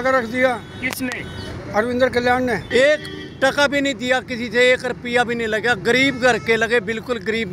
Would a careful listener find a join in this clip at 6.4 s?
no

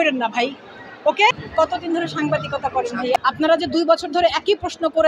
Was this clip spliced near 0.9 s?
no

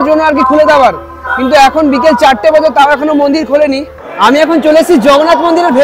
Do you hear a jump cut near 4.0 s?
yes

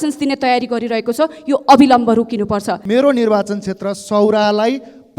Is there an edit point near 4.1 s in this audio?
no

